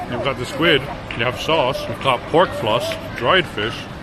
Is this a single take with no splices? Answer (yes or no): no